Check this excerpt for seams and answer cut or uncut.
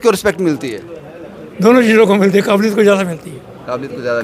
uncut